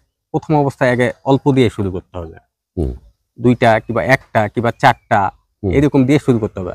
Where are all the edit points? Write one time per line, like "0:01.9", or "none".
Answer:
none